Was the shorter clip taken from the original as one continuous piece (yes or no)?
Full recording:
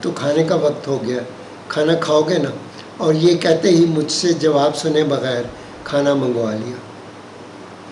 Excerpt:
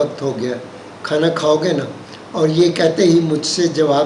yes